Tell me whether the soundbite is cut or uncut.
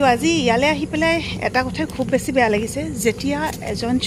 uncut